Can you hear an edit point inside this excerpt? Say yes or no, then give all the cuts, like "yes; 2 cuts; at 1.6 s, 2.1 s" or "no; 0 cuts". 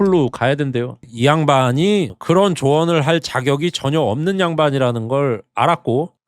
yes; 1 cut; at 1.0 s